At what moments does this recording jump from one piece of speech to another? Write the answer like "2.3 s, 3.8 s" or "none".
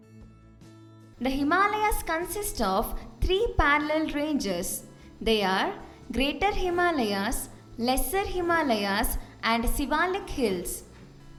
none

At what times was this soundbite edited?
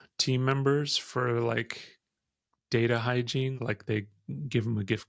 3.5 s

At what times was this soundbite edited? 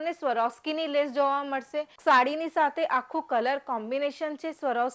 1.9 s

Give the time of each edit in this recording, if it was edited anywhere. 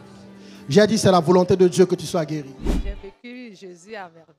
2.7 s

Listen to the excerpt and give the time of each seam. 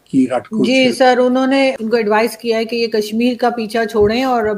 1.8 s

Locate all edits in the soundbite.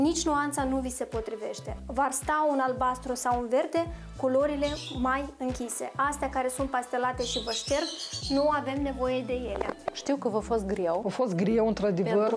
9.9 s

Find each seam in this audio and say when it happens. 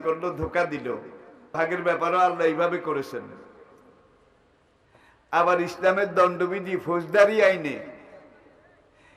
1.5 s

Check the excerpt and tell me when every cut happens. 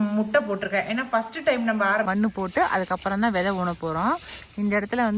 2.1 s

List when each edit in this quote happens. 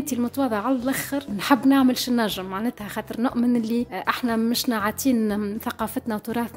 none

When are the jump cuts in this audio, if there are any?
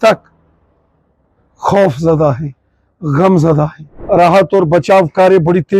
3.9 s

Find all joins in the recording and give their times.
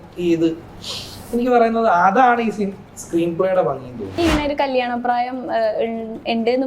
4.1 s

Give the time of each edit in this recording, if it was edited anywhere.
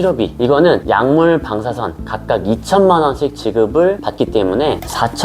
none

